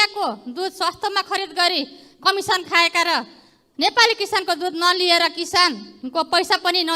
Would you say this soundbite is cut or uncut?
uncut